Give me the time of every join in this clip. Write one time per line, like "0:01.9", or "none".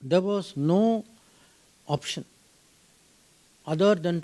none